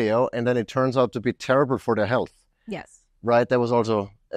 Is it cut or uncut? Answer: uncut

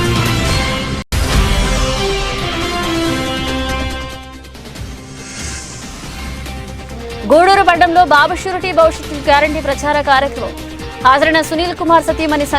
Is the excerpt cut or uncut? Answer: cut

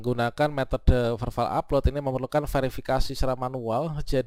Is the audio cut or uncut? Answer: uncut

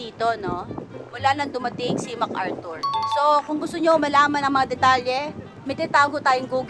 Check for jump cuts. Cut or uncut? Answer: uncut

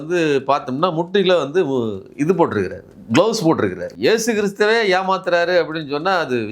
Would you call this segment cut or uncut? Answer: cut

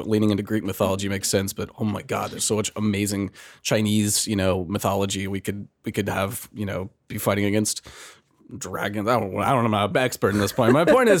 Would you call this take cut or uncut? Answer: uncut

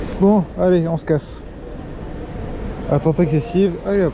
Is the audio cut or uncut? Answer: uncut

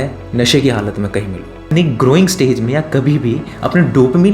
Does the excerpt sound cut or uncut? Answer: cut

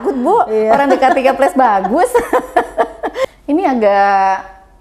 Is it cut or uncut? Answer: cut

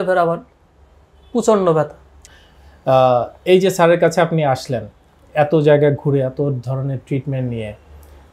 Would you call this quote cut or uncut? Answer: cut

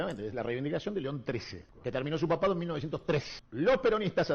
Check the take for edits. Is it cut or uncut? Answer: uncut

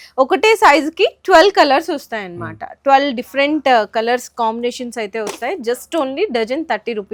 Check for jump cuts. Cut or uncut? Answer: uncut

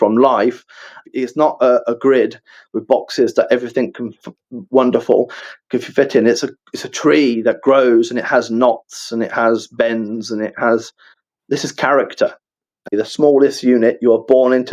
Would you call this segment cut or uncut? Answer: cut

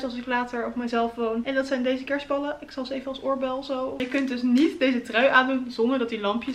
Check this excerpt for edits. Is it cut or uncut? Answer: cut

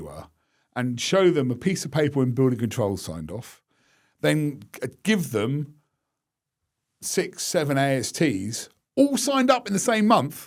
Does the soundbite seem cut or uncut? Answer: uncut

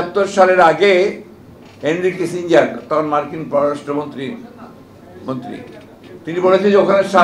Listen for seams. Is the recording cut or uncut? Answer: uncut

